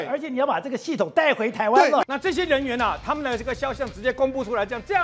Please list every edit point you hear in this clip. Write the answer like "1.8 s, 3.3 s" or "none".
2.0 s

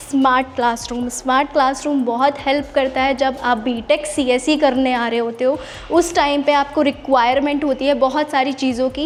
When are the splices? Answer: none

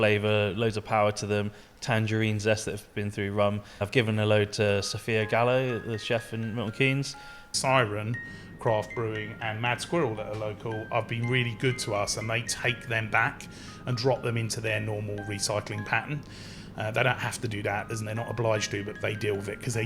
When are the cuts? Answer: 3.8 s, 7.4 s, 18.9 s

